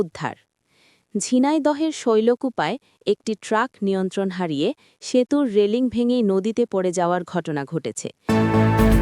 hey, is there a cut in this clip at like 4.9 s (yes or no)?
no